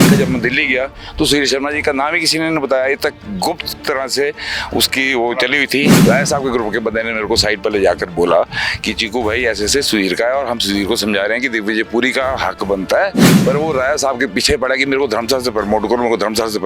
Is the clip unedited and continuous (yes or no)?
no